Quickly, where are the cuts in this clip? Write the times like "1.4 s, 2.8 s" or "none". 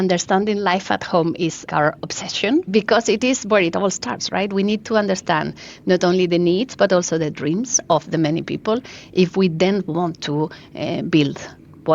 1.6 s, 2.7 s